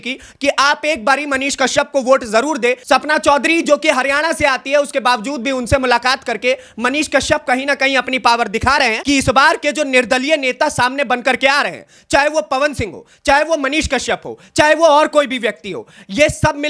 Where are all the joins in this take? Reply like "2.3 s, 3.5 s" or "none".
2.8 s, 9.0 s